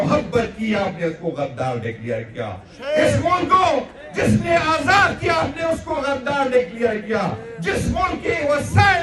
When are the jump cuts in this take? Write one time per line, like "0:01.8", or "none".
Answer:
none